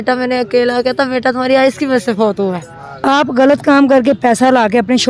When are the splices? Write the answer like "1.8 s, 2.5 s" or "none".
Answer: 3.1 s